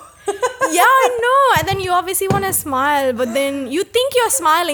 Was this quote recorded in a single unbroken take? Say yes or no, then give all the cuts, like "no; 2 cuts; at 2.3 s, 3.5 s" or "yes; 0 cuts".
yes; 0 cuts